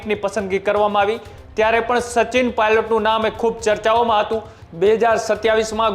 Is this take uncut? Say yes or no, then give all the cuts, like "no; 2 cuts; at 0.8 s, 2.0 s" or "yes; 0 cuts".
no; 1 cut; at 4.6 s